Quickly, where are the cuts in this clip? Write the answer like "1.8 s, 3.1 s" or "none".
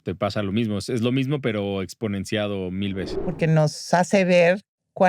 3.1 s